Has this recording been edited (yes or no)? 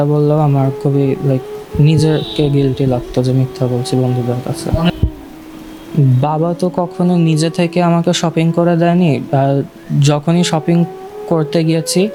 no